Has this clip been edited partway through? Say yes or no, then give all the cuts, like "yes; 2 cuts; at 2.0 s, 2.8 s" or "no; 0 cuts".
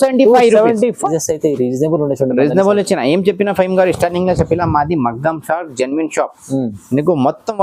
yes; 1 cut; at 1.1 s